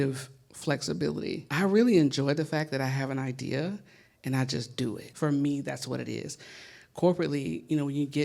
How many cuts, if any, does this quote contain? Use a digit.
2